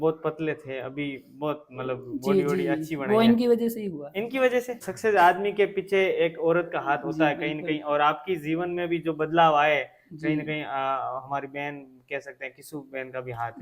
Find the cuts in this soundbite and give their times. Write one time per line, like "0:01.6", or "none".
0:04.9